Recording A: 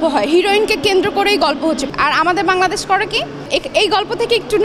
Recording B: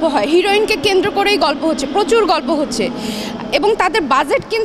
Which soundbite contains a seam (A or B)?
A